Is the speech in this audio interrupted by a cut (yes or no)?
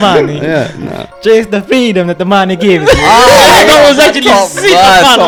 no